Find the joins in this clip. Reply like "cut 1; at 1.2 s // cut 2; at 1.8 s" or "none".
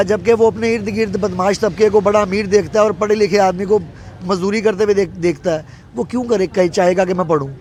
none